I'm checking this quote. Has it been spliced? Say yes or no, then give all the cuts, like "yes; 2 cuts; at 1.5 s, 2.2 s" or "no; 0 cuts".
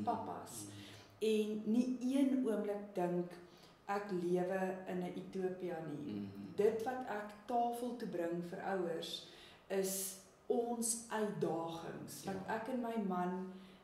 no; 0 cuts